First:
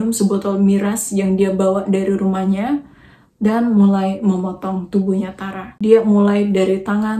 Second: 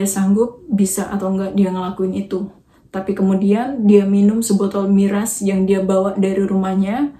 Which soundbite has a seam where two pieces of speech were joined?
first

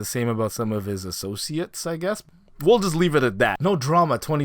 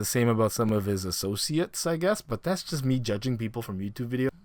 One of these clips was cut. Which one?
first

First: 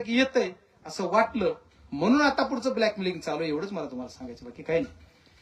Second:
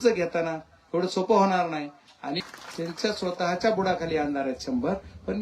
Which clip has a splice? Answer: second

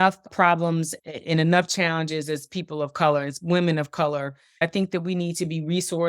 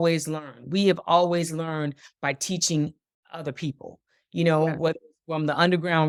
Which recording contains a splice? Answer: first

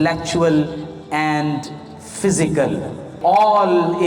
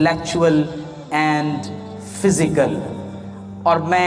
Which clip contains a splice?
first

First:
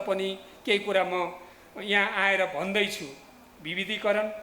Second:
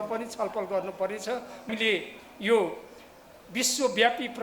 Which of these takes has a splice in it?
second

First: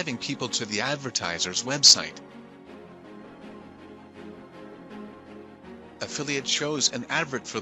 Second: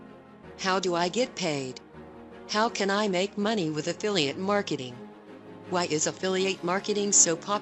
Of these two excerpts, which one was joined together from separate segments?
first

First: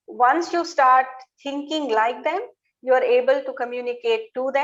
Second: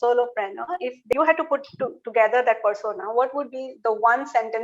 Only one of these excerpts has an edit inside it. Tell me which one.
second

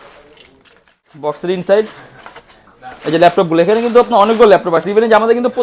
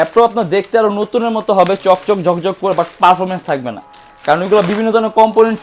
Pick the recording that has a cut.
first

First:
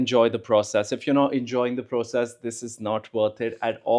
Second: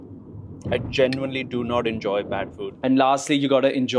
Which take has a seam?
second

